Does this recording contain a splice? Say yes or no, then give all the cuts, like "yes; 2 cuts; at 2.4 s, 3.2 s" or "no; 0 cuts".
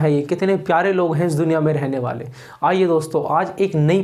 no; 0 cuts